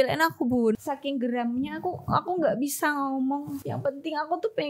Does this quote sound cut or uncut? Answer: cut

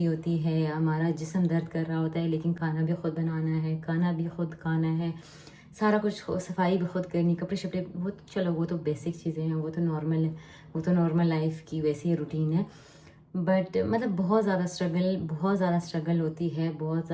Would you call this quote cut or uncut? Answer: uncut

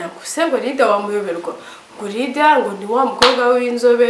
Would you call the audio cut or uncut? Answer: uncut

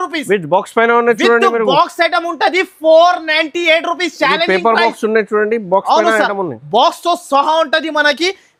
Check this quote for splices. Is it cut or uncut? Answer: uncut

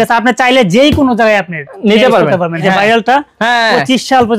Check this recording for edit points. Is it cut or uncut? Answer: cut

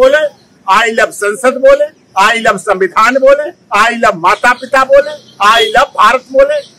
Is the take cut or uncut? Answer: uncut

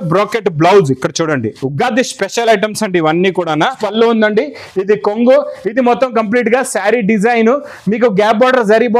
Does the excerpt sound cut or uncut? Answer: cut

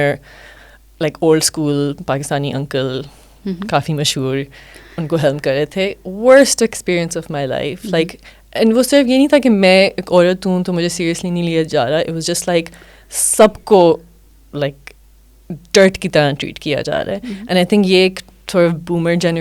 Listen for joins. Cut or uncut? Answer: uncut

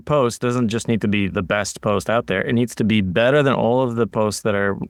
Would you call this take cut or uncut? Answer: uncut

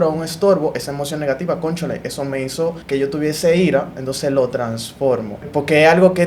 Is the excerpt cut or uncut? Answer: cut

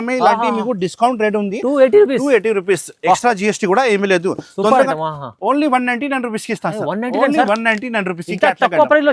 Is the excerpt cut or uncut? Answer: cut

